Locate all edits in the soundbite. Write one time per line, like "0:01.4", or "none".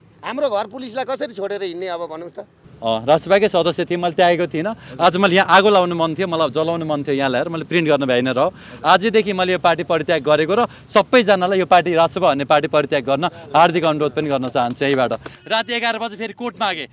0:02.6
0:15.3